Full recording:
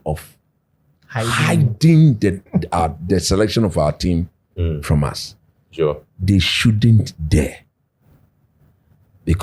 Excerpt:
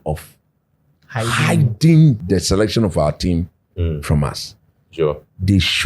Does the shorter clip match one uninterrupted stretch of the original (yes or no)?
no